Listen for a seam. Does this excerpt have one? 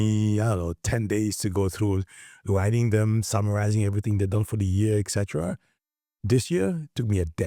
no; 0 cuts

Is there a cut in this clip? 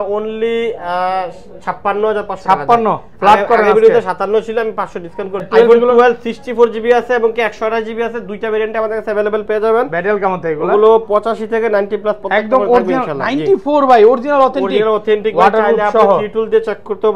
yes; 1 cut; at 5.5 s

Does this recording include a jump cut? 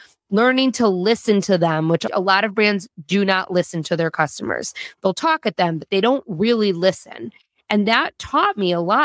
yes; 1 cut; at 2.0 s

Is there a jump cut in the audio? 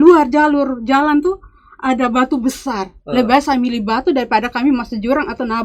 no; 0 cuts

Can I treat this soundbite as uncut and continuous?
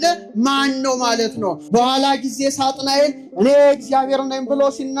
no; 1 cut; at 1.6 s

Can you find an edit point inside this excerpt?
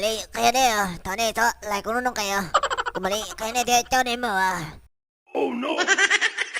yes; 1 cut; at 4.7 s

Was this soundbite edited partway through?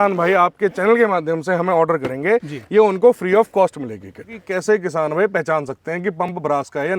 yes; 1 cut; at 4.4 s

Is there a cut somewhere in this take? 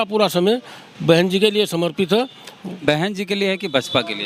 no; 0 cuts

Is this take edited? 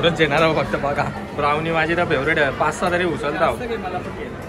no; 0 cuts

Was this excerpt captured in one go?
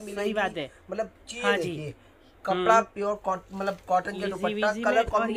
yes; 0 cuts

